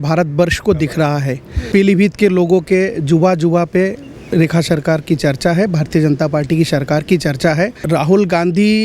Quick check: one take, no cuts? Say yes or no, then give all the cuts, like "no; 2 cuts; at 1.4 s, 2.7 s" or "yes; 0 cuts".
no; 2 cuts; at 1.7 s, 7.8 s